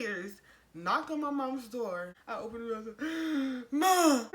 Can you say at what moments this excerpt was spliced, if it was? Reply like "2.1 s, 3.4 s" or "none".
2.2 s